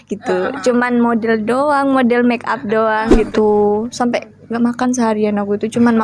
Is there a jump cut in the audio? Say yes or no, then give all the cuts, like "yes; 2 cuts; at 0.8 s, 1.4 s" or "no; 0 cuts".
yes; 1 cut; at 3.2 s